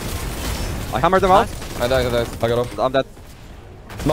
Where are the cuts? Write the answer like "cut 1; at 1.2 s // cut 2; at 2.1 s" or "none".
cut 1; at 3.1 s